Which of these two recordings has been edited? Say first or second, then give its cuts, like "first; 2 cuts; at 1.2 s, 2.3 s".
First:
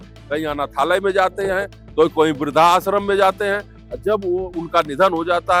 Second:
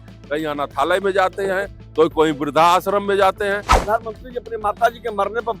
second; 1 cut; at 3.7 s